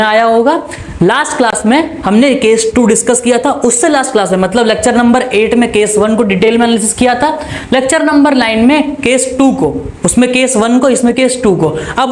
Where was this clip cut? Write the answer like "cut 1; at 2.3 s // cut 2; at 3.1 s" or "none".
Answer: none